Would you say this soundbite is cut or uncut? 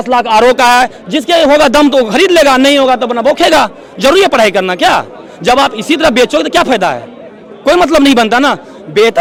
uncut